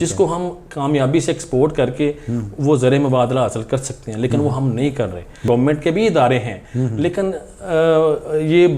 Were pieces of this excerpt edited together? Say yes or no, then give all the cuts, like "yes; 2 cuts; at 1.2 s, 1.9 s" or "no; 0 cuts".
yes; 1 cut; at 5.4 s